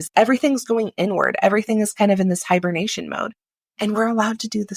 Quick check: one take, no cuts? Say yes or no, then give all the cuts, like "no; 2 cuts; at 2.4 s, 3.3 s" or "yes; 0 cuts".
yes; 0 cuts